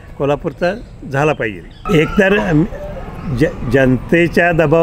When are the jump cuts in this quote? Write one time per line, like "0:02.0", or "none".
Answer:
0:01.7